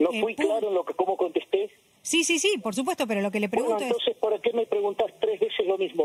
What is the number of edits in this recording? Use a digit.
0